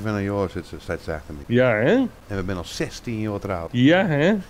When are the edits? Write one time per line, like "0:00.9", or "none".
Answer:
0:01.3
0:02.2
0:03.7